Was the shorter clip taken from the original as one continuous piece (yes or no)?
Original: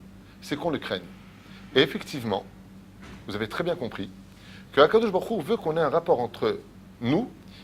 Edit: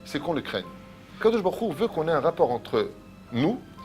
no